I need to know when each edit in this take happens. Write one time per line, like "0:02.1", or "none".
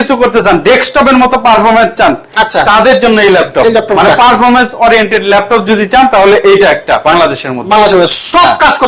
none